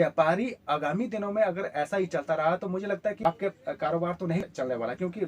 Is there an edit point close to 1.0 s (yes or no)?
no